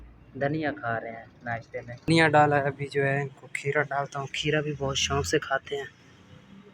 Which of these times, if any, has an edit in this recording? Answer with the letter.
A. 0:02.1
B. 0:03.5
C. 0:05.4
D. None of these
A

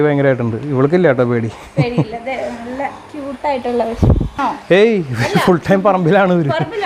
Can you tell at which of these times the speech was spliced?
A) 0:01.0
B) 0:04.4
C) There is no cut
B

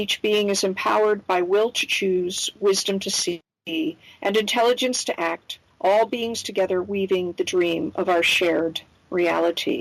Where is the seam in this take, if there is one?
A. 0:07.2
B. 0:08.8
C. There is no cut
C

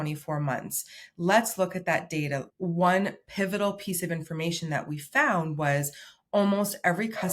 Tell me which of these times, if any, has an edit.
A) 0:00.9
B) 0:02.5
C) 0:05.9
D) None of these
B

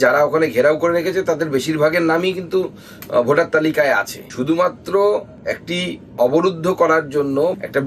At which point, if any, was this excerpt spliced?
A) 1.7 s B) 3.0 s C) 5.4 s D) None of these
D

